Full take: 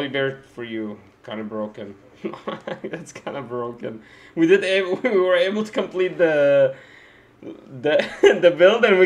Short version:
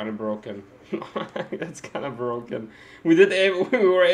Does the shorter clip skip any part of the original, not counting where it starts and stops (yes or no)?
no